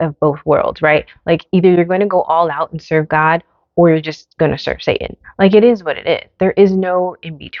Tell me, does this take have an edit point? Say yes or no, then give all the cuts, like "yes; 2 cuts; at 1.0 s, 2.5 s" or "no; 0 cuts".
no; 0 cuts